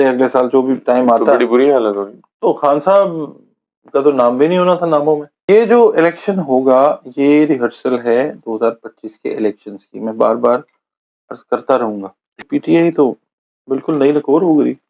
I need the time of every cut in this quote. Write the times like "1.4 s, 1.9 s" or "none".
5.3 s, 12.4 s